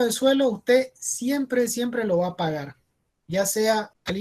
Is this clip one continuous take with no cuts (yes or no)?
yes